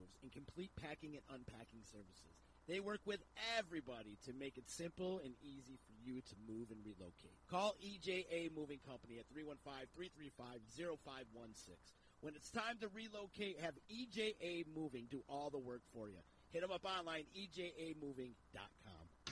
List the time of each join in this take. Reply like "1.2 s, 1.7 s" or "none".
none